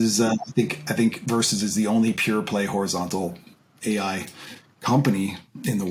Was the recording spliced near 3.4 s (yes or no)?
no